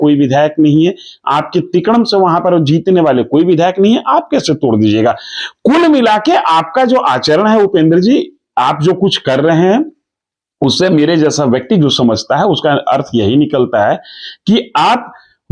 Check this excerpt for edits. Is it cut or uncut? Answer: uncut